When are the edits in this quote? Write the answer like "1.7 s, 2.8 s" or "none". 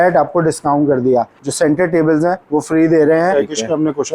1.4 s, 3.3 s